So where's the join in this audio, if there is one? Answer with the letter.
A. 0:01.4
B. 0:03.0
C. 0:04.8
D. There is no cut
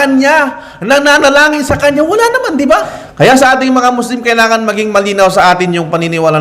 B